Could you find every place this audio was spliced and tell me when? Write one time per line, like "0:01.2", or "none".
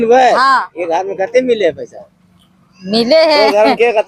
none

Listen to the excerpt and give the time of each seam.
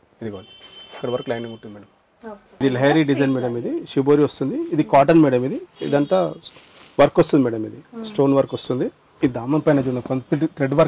0:02.6
0:09.0

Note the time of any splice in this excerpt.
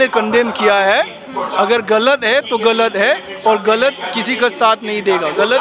none

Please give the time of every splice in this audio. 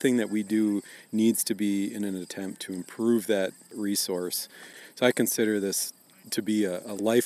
0:03.7
0:04.7

